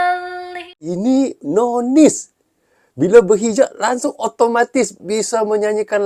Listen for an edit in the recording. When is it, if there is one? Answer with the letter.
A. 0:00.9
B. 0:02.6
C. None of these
A